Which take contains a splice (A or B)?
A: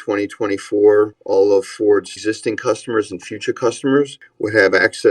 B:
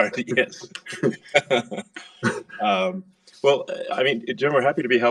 A